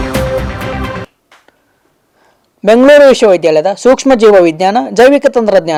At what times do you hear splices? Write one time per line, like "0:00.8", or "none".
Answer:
none